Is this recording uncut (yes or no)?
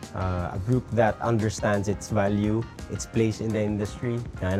yes